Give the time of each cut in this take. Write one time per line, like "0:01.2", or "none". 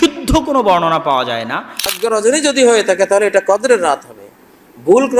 0:01.9